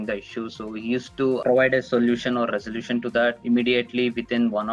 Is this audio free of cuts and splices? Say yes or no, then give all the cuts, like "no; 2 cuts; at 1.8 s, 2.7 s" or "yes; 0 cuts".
no; 2 cuts; at 1.4 s, 3.4 s